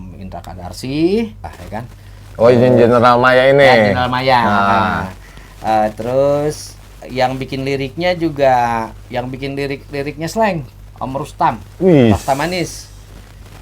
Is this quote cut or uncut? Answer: cut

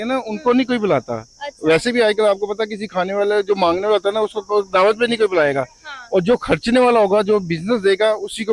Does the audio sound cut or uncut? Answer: uncut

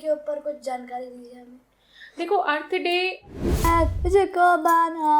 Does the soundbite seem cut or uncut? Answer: cut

